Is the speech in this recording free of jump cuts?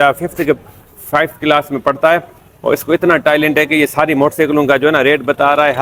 yes; 0 cuts

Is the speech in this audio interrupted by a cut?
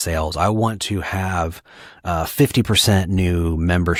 no; 0 cuts

